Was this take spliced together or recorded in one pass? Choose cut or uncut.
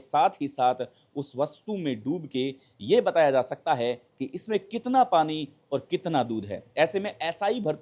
uncut